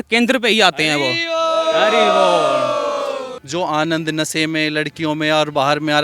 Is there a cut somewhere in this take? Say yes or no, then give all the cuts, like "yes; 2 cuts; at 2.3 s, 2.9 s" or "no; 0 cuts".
yes; 1 cut; at 3.4 s